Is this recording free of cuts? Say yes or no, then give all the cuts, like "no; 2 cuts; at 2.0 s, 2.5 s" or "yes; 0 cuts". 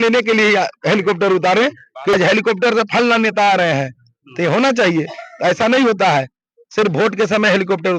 no; 1 cut; at 2.2 s